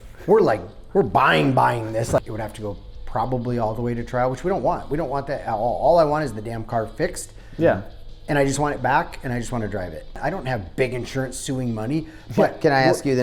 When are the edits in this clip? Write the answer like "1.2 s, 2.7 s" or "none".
2.2 s, 10.2 s